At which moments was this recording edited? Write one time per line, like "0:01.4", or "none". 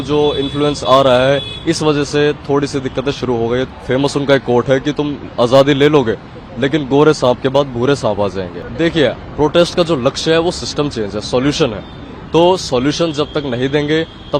0:03.7
0:08.7